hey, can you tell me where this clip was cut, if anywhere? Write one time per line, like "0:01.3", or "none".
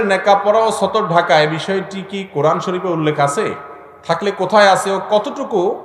none